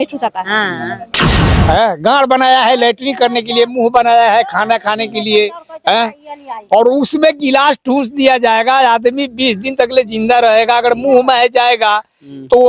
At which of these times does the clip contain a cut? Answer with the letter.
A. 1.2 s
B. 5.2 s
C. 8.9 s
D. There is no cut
A